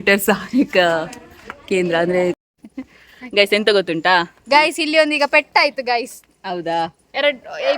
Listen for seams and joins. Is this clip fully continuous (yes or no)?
no